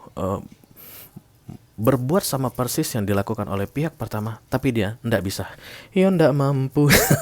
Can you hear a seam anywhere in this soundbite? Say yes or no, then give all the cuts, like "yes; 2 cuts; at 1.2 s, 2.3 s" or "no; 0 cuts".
no; 0 cuts